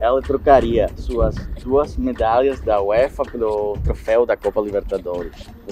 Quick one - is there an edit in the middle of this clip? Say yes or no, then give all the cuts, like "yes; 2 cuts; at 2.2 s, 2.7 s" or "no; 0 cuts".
no; 0 cuts